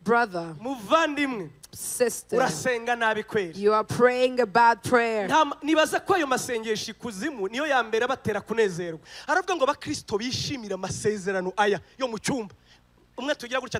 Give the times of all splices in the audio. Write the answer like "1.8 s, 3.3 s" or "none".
9.0 s